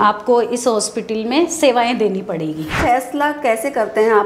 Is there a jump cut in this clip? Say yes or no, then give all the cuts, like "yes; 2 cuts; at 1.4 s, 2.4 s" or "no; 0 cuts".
yes; 1 cut; at 2.7 s